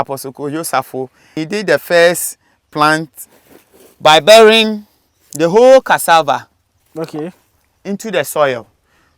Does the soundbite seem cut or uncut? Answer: cut